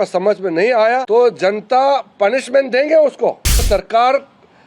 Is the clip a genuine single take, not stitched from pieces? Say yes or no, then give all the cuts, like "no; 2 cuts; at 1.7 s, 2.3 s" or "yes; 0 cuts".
no; 2 cuts; at 1.0 s, 3.6 s